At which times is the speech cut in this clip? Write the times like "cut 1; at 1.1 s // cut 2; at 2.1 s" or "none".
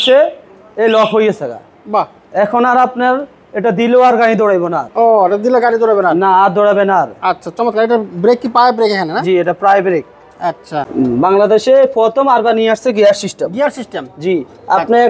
none